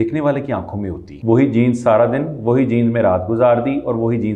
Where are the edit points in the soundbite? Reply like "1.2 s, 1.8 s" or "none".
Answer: 1.1 s